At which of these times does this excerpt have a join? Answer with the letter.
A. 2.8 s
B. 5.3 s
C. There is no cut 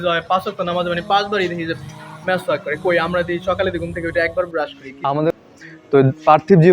B